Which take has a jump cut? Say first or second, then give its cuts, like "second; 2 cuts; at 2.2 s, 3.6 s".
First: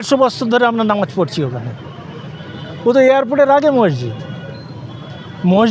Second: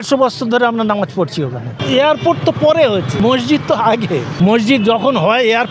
second; 3 cuts; at 1.8 s, 3.1 s, 4.3 s